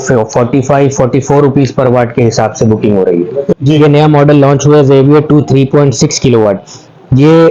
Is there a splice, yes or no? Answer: yes